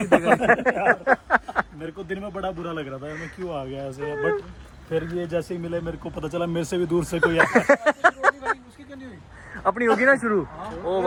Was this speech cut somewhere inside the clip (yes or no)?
no